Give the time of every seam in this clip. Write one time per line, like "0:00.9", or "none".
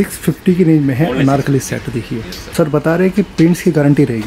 0:02.4

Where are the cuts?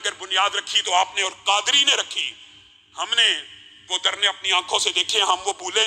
none

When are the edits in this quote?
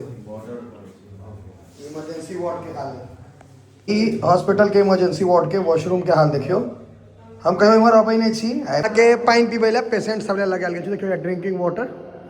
0:03.9
0:08.8

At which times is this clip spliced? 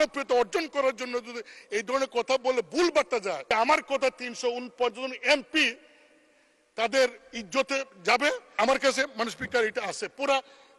0:03.4
0:08.5

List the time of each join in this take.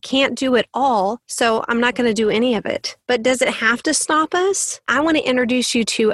0:01.2
0:02.9
0:04.9

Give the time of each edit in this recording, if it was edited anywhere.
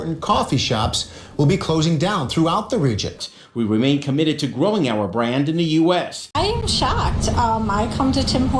0:03.2
0:06.2

